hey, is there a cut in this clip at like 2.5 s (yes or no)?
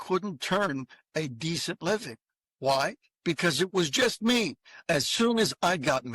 no